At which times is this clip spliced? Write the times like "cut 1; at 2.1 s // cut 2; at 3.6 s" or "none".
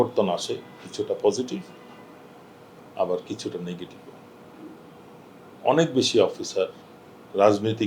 none